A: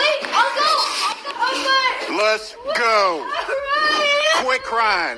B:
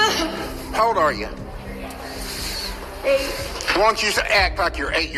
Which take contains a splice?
A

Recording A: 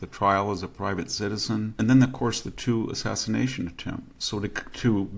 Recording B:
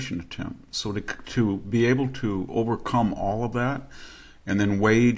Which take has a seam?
A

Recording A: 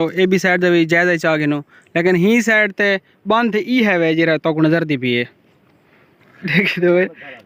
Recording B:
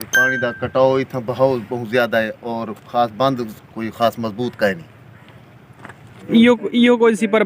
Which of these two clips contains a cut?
B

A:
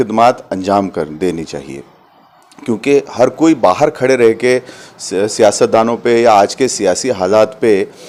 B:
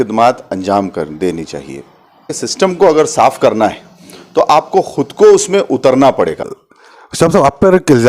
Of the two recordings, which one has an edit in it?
B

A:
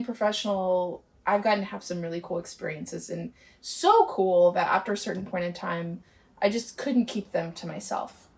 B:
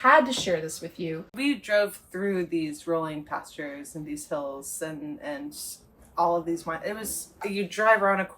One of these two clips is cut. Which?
B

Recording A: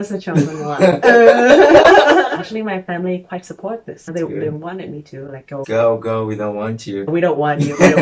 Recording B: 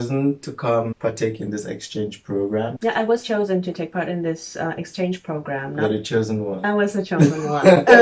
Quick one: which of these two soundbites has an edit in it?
A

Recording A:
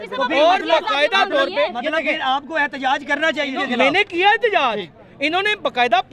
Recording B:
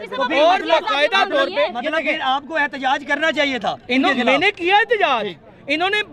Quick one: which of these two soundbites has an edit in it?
A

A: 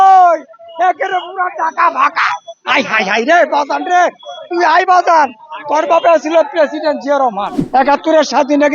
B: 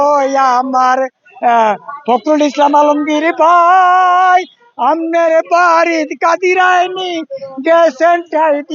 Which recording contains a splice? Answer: A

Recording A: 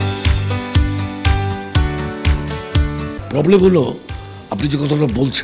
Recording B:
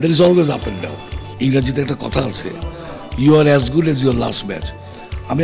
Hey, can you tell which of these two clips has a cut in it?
A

